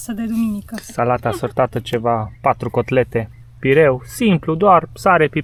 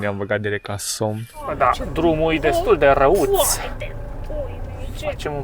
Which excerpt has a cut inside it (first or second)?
second